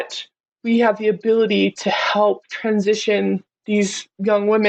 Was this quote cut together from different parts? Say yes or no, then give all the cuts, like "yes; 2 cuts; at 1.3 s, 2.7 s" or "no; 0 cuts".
no; 0 cuts